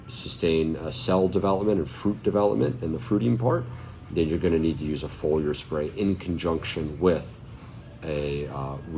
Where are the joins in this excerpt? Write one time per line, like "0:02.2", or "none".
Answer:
none